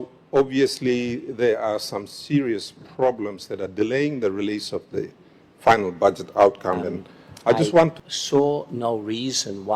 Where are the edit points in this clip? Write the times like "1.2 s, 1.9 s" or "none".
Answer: 7.9 s

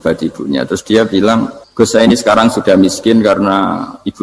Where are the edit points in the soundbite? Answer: 1.6 s

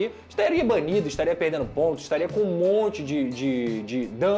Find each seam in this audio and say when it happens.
none

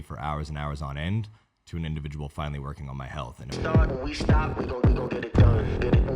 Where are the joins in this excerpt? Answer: 3.4 s

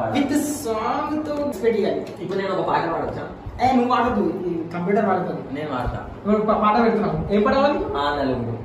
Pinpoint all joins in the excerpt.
1.5 s

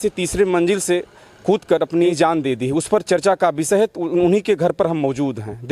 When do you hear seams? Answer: 2.1 s

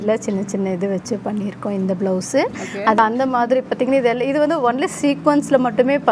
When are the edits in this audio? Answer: 3.0 s

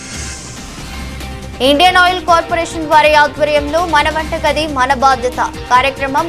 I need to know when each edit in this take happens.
1.6 s

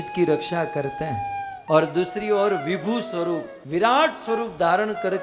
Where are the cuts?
1.6 s, 3.5 s

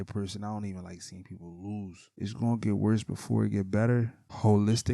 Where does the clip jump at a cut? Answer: 2.2 s

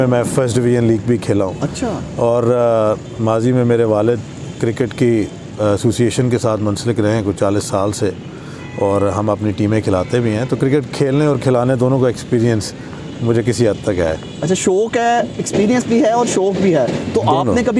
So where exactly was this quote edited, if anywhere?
none

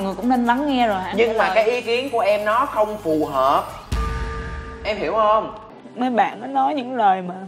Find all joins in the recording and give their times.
5.8 s

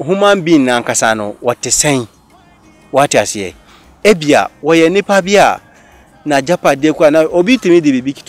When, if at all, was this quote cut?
none

